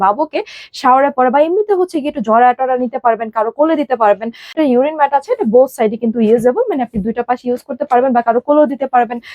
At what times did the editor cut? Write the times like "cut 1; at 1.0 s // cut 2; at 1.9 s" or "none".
cut 1; at 4.6 s